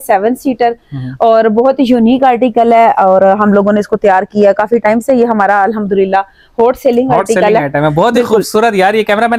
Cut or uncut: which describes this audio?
uncut